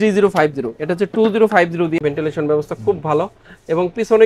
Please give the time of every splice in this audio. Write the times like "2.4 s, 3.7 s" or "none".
2.0 s